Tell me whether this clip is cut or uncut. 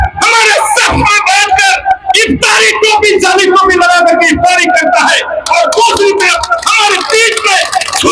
uncut